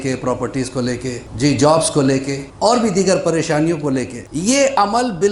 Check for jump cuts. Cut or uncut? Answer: cut